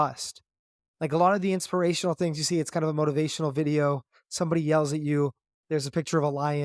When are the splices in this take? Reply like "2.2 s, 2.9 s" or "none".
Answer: none